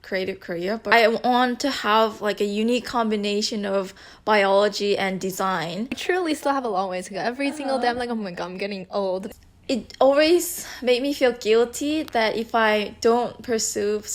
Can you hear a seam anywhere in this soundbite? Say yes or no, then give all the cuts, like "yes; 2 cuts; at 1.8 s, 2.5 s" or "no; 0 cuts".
yes; 3 cuts; at 0.8 s, 6.0 s, 9.3 s